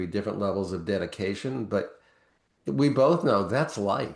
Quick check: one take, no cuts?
yes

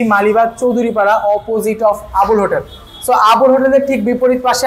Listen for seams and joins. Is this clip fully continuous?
yes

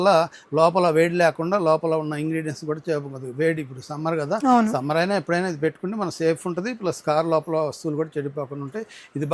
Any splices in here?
no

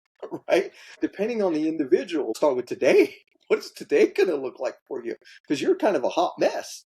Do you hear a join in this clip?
yes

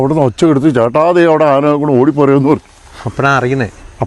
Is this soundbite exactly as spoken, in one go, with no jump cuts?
yes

